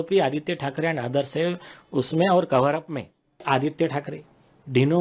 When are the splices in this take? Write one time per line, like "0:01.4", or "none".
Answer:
0:03.4